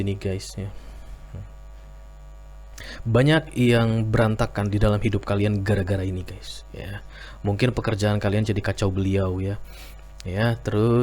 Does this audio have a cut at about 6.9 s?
no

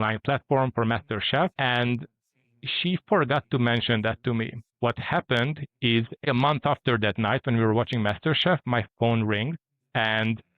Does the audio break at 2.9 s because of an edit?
no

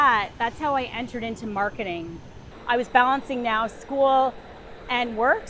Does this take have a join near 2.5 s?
yes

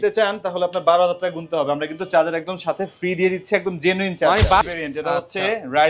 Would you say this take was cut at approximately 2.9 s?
no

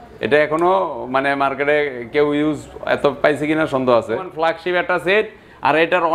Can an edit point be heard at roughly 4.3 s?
yes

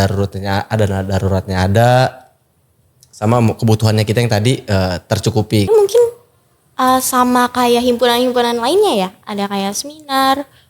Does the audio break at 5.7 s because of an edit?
yes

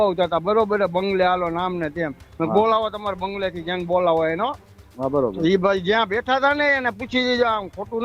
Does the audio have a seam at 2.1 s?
no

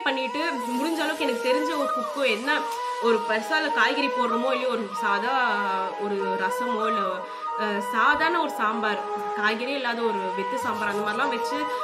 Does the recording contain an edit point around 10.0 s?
no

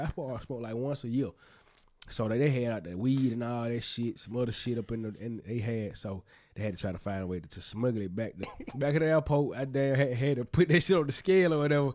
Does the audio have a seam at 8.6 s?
yes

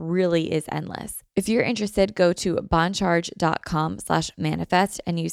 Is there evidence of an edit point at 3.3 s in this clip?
no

